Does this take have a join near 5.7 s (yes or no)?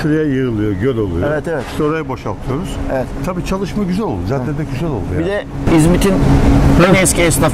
no